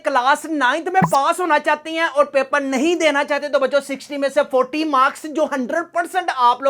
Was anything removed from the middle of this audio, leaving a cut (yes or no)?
no